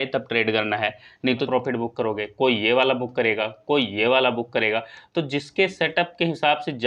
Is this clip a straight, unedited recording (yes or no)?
no